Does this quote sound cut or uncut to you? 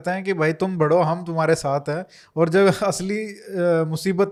uncut